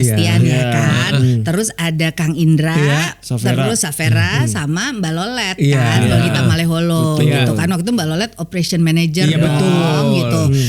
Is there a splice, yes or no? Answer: no